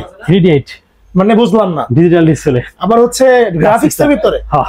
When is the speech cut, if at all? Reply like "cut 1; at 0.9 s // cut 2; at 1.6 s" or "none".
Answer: none